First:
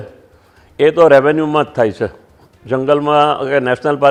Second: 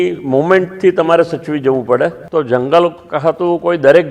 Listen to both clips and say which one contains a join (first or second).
second